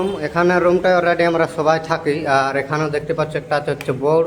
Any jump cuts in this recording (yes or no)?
no